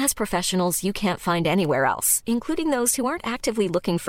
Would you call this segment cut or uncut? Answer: uncut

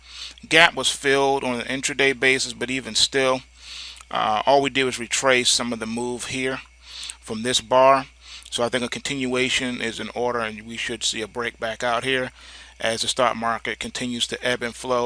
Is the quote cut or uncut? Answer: cut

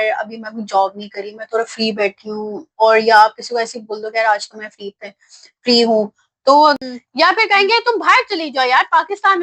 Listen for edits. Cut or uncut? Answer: cut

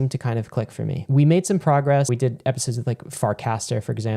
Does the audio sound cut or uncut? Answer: cut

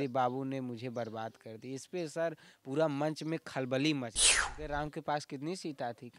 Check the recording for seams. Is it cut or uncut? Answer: cut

